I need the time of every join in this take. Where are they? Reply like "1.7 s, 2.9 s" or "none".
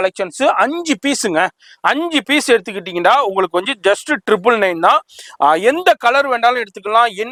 none